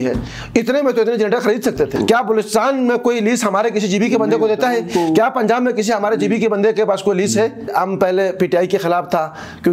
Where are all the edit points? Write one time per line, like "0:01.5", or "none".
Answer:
0:01.9
0:07.7